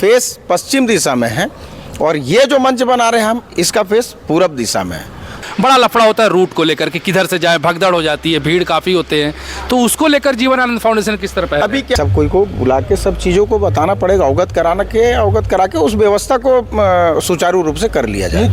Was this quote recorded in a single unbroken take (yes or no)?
no